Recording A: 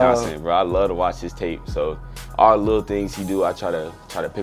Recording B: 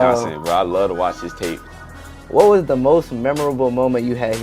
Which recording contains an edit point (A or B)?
B